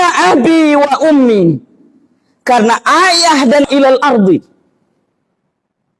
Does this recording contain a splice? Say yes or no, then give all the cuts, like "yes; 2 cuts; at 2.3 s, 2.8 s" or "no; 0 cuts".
yes; 1 cut; at 3.7 s